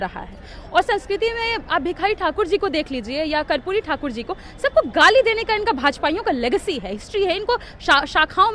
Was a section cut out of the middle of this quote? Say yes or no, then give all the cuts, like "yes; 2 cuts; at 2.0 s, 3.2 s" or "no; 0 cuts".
no; 0 cuts